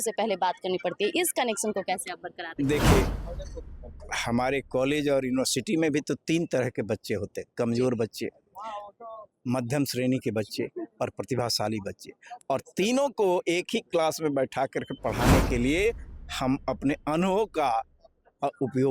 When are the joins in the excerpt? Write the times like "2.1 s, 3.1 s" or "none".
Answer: none